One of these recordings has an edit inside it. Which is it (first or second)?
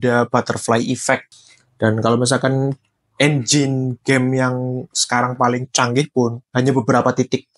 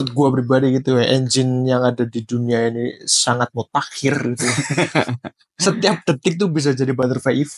first